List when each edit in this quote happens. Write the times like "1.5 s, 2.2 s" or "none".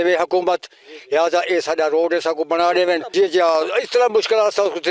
3.1 s